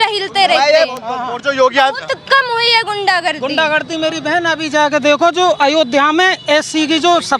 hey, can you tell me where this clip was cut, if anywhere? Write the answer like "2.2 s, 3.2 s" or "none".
none